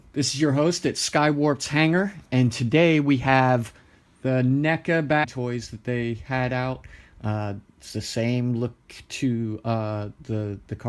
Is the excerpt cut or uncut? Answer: uncut